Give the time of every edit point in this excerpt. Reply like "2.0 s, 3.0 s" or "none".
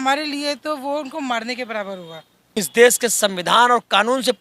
2.6 s